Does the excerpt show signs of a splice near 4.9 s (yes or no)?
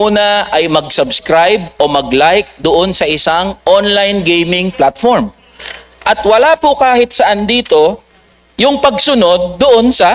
no